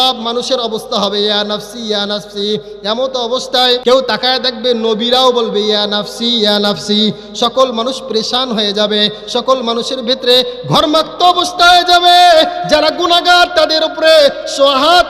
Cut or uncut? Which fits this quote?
cut